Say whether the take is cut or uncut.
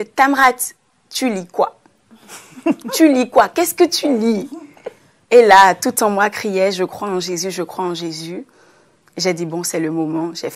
uncut